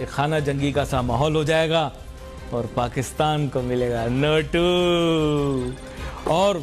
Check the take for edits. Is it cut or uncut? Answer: uncut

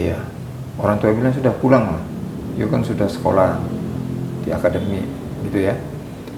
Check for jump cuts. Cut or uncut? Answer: uncut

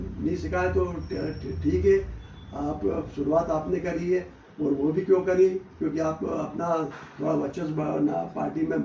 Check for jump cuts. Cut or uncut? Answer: uncut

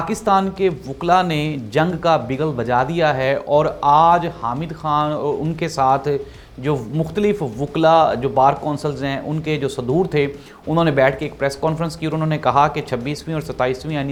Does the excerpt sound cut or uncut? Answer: uncut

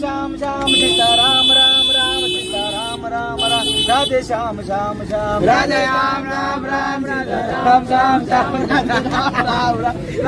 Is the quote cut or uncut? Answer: uncut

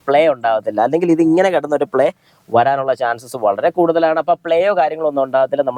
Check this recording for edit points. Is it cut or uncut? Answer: uncut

